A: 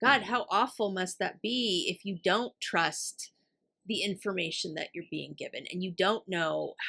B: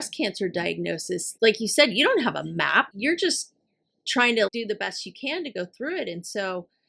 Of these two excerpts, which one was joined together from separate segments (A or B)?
B